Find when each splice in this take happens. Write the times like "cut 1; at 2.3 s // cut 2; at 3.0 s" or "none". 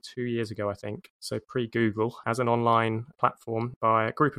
cut 1; at 1.1 s // cut 2; at 2.2 s // cut 3; at 3.2 s

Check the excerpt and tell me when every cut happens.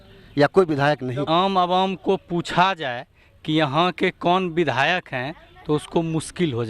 cut 1; at 1.3 s

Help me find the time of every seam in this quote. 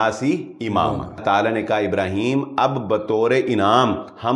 cut 1; at 1.2 s

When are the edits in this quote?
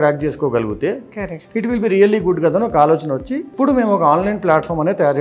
cut 1; at 3.5 s

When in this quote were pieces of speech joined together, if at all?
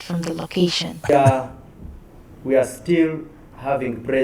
none

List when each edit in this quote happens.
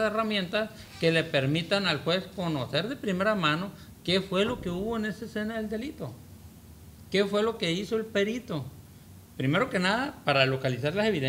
none

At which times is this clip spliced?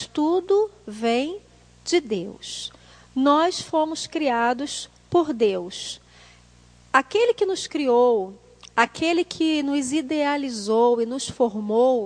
cut 1; at 3.4 s

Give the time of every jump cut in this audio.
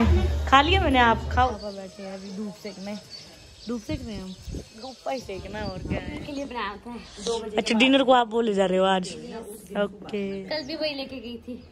cut 1; at 1.6 s // cut 2; at 6.2 s

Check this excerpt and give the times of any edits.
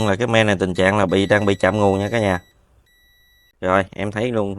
cut 1; at 3.5 s

